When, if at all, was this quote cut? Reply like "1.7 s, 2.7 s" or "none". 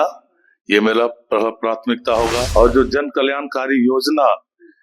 2.5 s